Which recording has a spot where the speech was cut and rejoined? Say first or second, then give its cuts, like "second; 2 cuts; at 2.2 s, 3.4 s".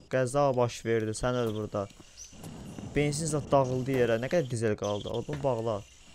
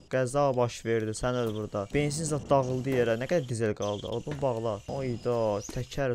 second; 2 cuts; at 1.9 s, 4.8 s